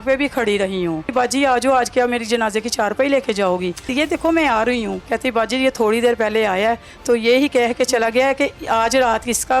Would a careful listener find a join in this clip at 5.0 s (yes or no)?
yes